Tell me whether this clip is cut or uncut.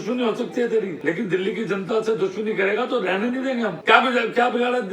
cut